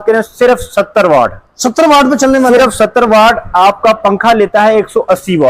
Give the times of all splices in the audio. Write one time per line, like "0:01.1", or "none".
none